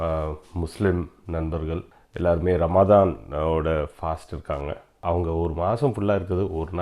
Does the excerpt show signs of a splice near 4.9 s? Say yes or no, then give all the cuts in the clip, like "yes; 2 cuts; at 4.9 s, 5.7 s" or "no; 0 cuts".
yes; 2 cuts; at 2.0 s, 4.9 s